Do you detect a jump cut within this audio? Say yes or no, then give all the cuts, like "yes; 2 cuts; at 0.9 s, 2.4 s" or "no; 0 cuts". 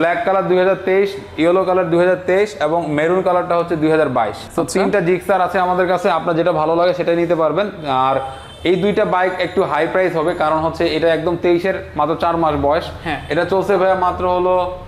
no; 0 cuts